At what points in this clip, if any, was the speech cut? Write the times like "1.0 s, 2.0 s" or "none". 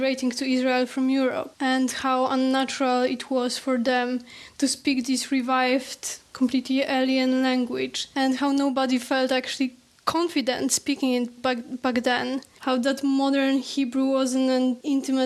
1.5 s, 8.0 s, 11.2 s, 12.5 s

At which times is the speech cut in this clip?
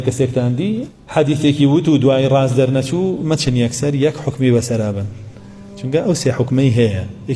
1.0 s

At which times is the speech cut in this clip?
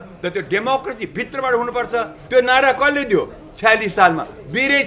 2.2 s

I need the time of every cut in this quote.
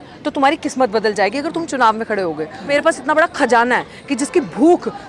2.7 s

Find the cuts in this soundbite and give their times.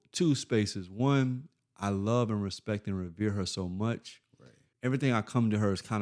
4.6 s

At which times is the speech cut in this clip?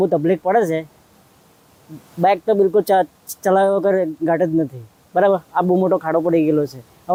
none

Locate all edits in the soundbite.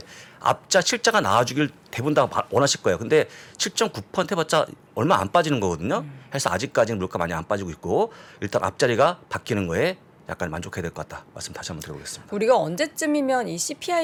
none

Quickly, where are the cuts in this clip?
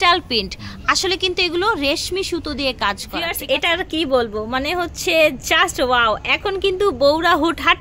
3.3 s

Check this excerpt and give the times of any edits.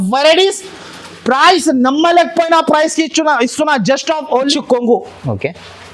4.5 s

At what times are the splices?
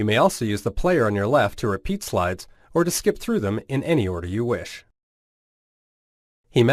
none

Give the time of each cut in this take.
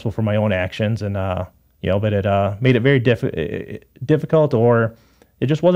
none

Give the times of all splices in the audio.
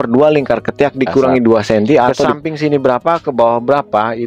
2.2 s

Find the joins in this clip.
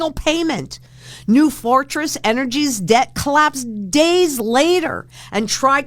none

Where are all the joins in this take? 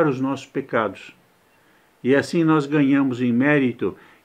none

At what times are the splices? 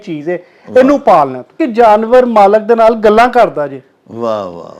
1.6 s

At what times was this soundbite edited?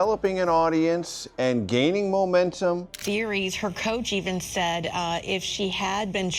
2.9 s

